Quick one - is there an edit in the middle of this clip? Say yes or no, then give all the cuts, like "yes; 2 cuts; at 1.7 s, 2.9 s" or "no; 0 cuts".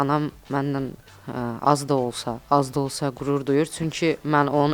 no; 0 cuts